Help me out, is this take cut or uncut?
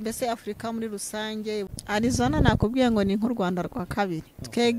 cut